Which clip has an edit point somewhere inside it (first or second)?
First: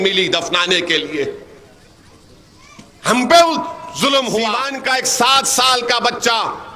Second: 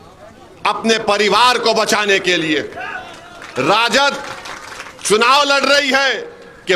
first